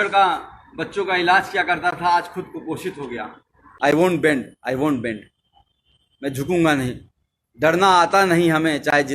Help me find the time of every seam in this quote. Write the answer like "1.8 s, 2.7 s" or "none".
3.7 s